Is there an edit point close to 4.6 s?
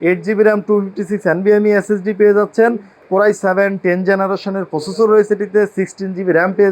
no; 1 cut; at 2.9 s

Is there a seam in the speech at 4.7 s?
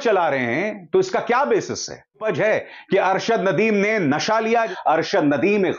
yes; 2 cuts; at 2.2 s, 4.7 s

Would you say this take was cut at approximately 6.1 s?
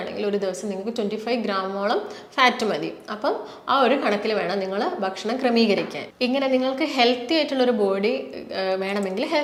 no; 0 cuts

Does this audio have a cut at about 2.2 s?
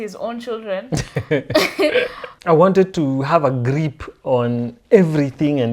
yes; 1 cut; at 2.2 s

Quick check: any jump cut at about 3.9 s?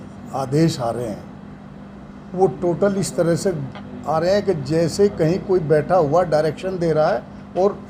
no; 0 cuts

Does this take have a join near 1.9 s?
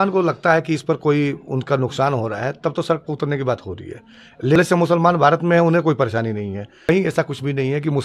no; 2 cuts; at 4.6 s, 6.9 s

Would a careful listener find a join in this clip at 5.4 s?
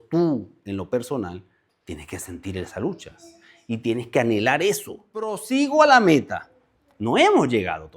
yes; 1 cut; at 5.4 s

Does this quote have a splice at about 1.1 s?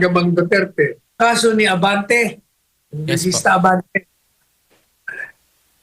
yes; 1 cut; at 1.1 s

